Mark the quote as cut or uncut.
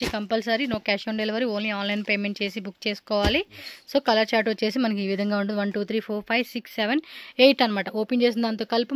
uncut